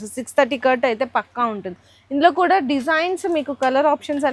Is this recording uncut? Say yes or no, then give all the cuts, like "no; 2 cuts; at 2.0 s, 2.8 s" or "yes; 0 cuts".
yes; 0 cuts